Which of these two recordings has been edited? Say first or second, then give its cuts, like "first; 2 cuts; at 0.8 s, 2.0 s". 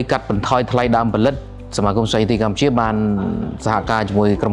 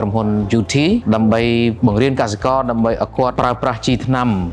second; 3 cuts; at 1.0 s, 1.8 s, 3.3 s